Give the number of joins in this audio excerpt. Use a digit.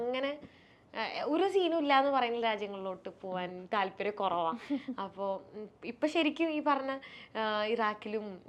0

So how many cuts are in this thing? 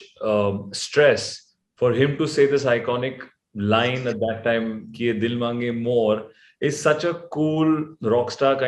0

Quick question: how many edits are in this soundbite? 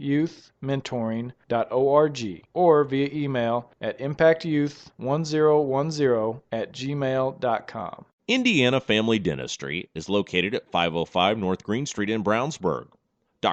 0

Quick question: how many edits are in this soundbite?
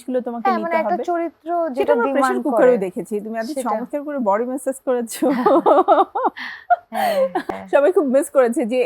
1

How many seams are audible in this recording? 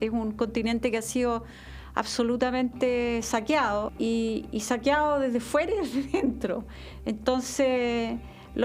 1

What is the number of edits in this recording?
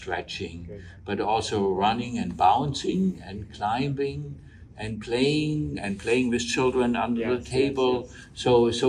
0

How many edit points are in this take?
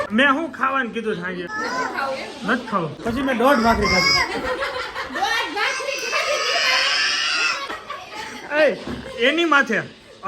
3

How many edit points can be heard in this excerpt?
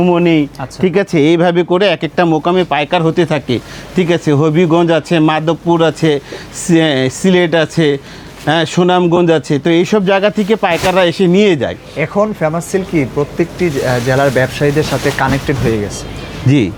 0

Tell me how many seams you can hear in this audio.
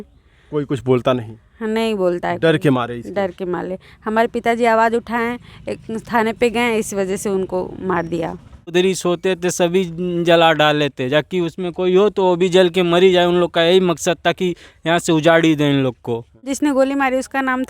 2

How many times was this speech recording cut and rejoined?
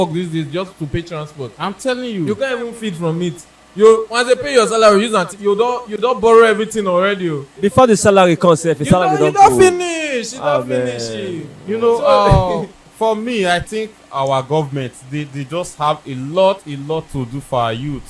0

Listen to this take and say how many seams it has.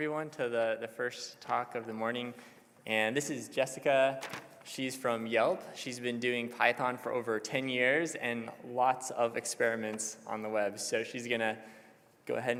0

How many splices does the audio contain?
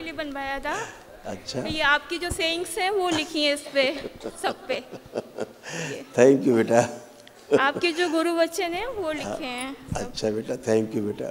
0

